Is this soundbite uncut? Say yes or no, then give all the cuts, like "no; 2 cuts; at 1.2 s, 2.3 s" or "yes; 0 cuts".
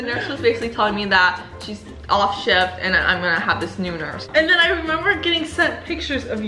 no; 1 cut; at 4.2 s